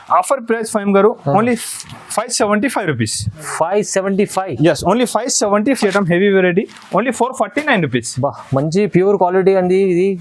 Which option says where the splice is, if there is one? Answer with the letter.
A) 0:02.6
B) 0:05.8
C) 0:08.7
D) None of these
B